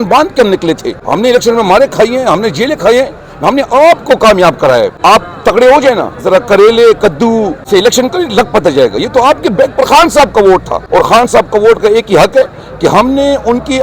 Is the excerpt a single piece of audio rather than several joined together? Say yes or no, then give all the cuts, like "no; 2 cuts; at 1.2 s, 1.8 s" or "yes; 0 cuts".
no; 4 cuts; at 0.9 s, 4.9 s, 7.6 s, 10.8 s